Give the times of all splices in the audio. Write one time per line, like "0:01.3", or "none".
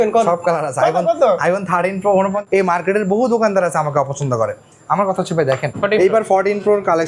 0:02.4
0:05.7